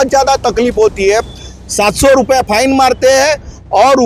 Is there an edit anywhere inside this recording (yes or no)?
no